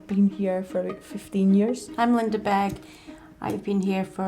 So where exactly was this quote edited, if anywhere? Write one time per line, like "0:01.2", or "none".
0:01.9